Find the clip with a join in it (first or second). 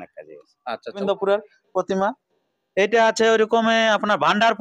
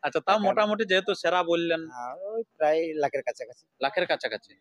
first